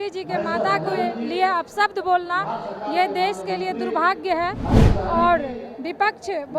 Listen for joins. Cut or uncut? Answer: uncut